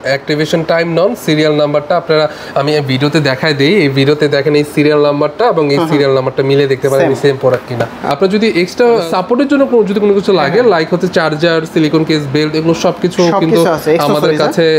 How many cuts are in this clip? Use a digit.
1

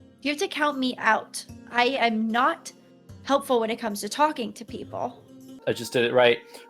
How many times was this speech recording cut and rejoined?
1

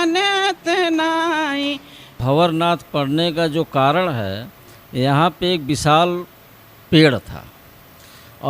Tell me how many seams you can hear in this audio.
1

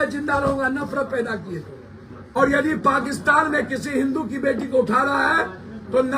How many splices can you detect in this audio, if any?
1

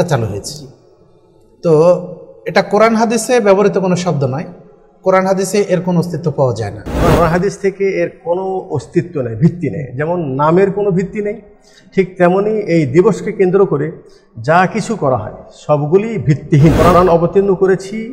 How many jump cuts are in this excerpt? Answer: 2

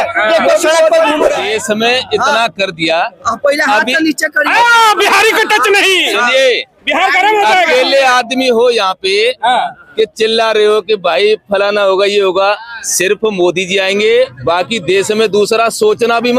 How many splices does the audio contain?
1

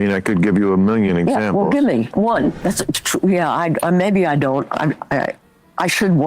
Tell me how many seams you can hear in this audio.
1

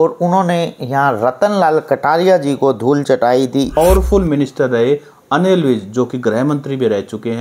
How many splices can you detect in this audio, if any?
1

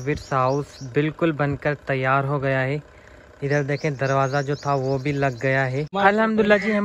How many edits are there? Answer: 1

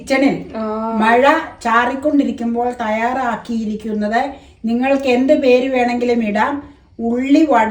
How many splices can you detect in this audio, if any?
0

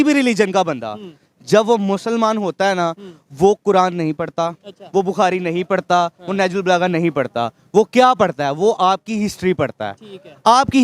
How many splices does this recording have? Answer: 0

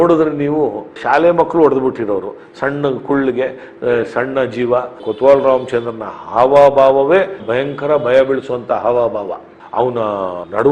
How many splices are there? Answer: 3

